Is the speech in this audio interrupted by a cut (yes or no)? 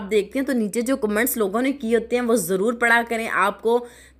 no